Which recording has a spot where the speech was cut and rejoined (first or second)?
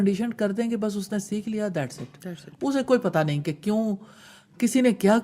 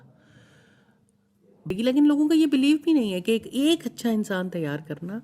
second